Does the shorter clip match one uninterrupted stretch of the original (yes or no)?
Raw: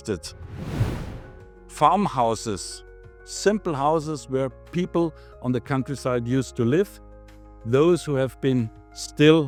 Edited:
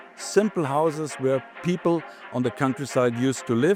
yes